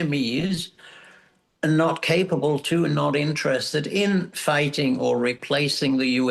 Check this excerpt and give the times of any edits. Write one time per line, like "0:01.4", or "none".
none